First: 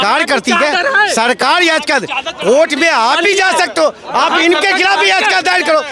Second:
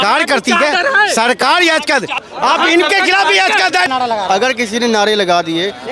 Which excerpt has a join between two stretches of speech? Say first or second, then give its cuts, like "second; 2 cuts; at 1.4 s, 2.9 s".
second; 2 cuts; at 2.3 s, 3.9 s